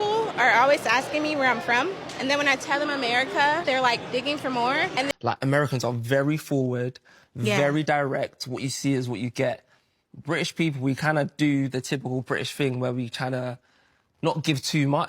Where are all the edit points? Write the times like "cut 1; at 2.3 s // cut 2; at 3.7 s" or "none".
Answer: cut 1; at 5.1 s